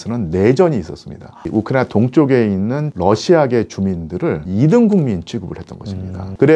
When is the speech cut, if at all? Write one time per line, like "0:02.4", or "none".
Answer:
0:01.3